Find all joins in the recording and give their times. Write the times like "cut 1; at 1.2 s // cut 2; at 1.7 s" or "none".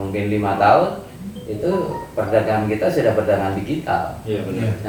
none

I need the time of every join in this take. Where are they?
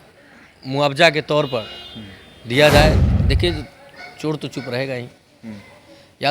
cut 1; at 3.0 s

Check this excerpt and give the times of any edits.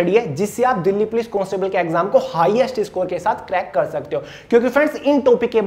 none

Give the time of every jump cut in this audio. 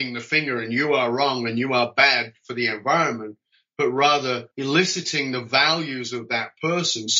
cut 1; at 4.5 s

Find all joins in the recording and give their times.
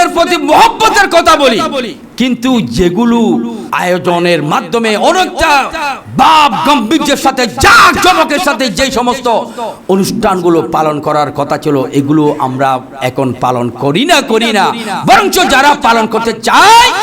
cut 1; at 3.6 s

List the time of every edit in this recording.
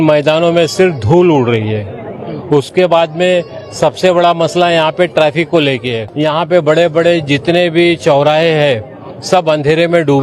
cut 1; at 6.0 s

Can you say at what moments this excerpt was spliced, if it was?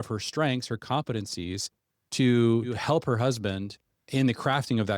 cut 1; at 2.8 s // cut 2; at 4.1 s

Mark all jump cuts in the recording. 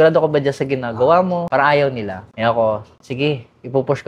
cut 1; at 1.5 s

